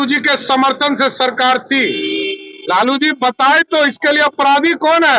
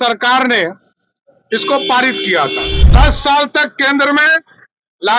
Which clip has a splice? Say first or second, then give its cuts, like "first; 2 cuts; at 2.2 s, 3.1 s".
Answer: second; 1 cut; at 2.8 s